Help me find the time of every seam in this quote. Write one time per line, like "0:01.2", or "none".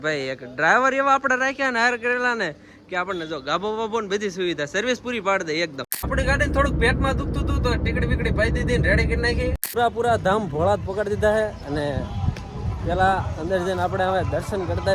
0:06.1
0:09.6